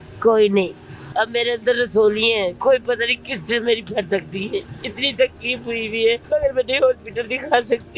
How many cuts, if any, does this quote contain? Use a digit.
3